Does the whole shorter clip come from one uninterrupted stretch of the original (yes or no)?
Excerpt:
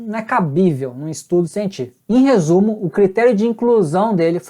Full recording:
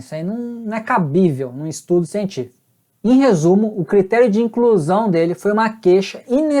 no